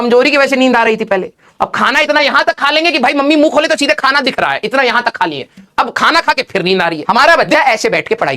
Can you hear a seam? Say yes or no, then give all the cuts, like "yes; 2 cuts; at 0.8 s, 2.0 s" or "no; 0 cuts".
yes; 1 cut; at 7.0 s